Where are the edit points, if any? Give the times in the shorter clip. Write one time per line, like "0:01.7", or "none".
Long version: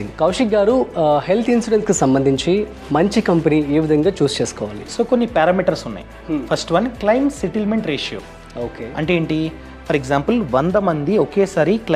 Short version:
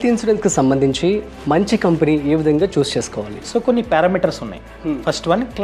none